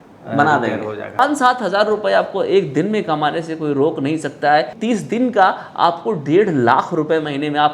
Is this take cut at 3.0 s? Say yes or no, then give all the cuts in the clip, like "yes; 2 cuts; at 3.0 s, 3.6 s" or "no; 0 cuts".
no; 2 cuts; at 1.2 s, 4.8 s